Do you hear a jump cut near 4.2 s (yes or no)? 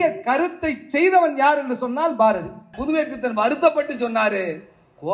no